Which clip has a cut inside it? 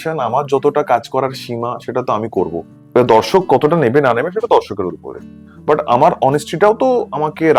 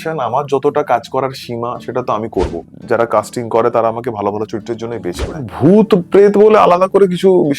second; 2 cuts; at 2.7 s, 5.5 s

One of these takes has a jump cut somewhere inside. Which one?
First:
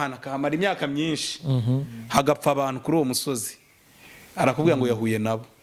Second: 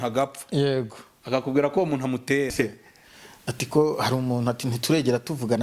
second; 1 cut; at 2.5 s

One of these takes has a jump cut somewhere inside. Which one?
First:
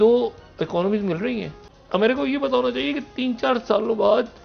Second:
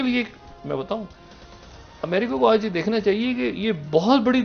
first; 1 cut; at 1.6 s

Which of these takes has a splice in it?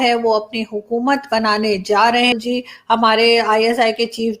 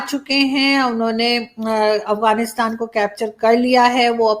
first; 1 cut; at 2.4 s

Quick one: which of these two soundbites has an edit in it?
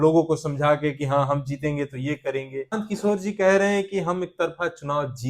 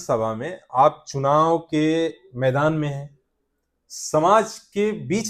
first; 1 cut; at 2.7 s

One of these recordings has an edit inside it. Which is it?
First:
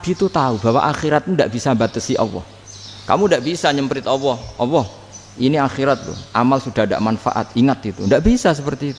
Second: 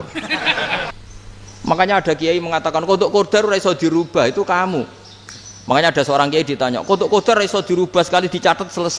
second; 1 cut; at 0.9 s

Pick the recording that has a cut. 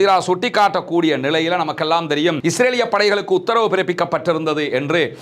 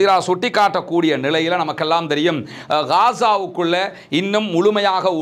first; 1 cut; at 2.4 s

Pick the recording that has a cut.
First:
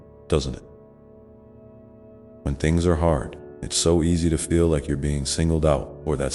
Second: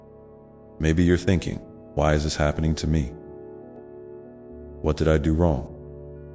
second; 3 cuts; at 0.8 s, 3.1 s, 4.8 s

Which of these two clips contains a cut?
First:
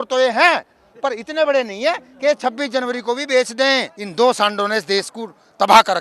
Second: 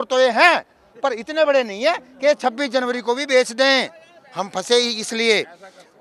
first; 1 cut; at 4.0 s

